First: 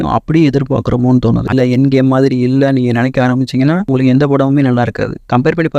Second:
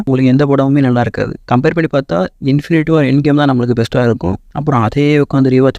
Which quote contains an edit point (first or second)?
first